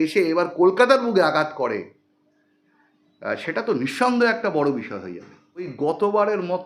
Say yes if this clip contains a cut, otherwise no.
yes